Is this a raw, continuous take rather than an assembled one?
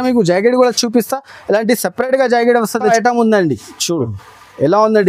no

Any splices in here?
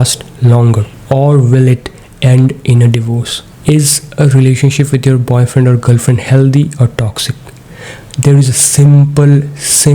no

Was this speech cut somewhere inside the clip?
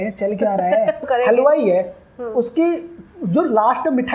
yes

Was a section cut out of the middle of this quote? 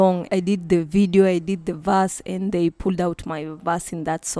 no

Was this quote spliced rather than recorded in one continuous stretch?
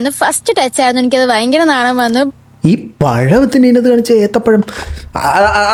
no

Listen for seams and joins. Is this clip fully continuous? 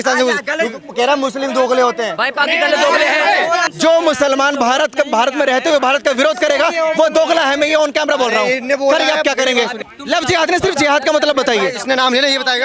no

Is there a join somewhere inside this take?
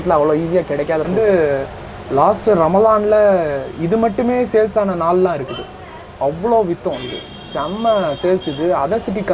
yes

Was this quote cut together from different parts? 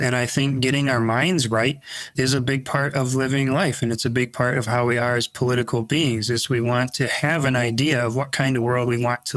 no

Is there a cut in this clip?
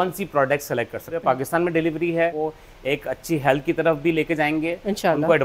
yes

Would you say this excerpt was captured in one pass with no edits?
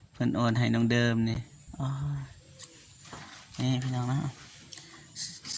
yes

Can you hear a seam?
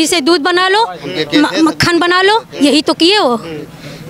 no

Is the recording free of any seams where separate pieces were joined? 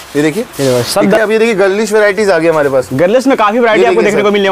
no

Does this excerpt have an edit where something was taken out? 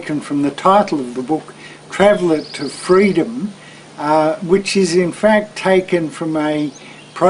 no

